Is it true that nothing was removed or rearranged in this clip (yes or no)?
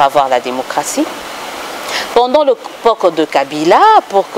yes